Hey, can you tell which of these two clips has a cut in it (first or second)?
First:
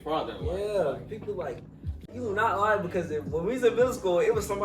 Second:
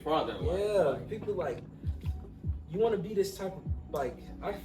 first